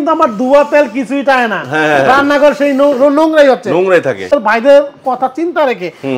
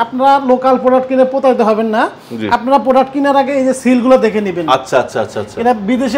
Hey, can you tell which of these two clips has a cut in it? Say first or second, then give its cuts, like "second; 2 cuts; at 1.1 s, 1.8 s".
first; 1 cut; at 4.3 s